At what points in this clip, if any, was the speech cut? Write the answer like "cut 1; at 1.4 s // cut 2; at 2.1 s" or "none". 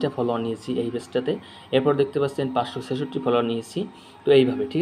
none